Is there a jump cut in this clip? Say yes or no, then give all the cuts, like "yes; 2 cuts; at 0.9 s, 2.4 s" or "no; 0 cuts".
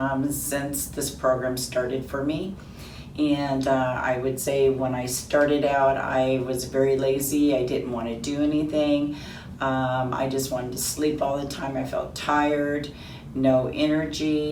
no; 0 cuts